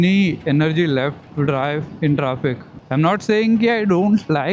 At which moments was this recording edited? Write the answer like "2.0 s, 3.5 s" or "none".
1.2 s, 2.7 s